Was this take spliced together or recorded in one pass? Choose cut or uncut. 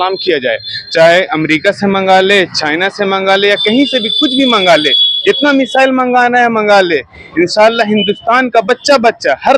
uncut